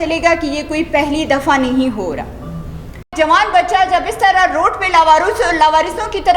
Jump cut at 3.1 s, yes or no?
yes